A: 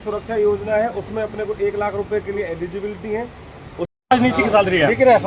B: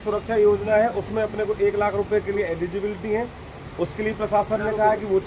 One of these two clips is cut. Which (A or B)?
A